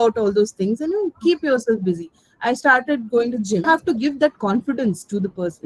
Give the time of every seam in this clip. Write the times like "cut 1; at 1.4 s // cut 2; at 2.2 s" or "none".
cut 1; at 3.6 s